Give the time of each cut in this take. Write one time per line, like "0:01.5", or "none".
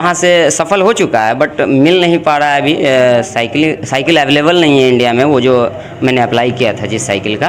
none